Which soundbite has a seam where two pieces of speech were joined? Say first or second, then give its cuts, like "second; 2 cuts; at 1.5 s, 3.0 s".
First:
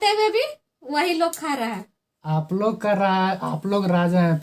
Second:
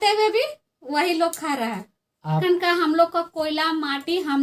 second; 1 cut; at 2.4 s